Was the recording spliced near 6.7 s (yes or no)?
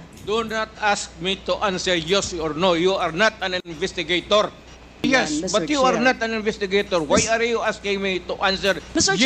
no